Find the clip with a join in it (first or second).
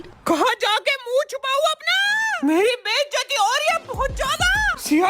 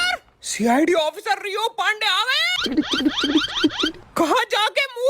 second